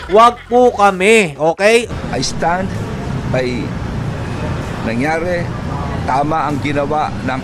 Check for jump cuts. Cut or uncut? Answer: cut